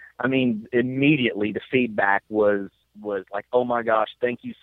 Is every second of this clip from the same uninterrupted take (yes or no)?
no